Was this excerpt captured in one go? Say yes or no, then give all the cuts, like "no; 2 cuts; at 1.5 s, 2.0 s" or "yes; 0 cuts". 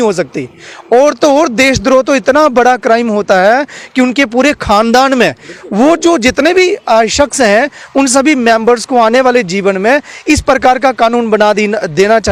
yes; 0 cuts